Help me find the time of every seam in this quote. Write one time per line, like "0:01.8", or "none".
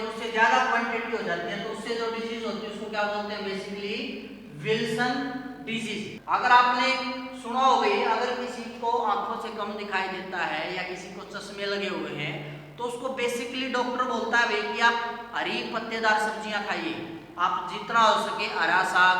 0:06.1